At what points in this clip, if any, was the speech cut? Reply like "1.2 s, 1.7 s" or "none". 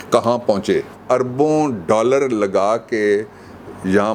1.0 s